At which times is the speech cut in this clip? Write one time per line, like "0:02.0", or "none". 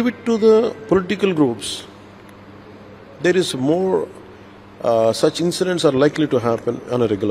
none